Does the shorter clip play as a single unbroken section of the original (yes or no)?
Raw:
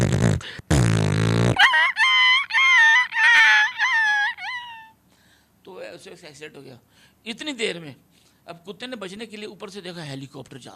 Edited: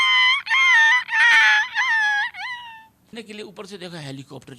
no